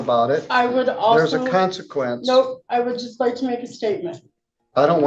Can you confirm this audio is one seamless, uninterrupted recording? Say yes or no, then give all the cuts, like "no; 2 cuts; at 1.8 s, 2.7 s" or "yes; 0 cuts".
yes; 0 cuts